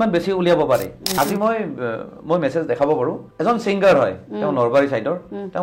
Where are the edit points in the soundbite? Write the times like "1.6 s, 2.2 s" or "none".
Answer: 1.1 s, 3.2 s

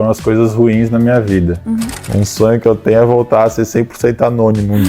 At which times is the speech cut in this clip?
2.0 s

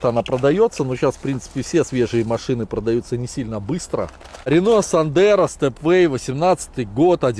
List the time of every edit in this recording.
4.5 s

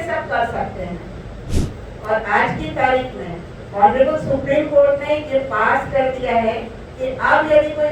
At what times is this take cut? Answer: 1.5 s

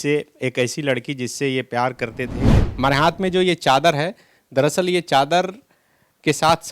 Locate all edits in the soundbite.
2.6 s

